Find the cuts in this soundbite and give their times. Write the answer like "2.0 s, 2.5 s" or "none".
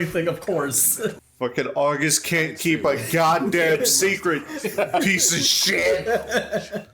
1.2 s